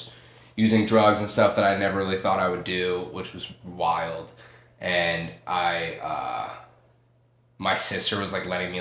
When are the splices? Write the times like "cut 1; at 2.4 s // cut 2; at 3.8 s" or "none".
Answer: none